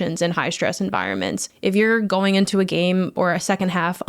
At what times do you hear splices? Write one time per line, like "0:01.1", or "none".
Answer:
0:01.5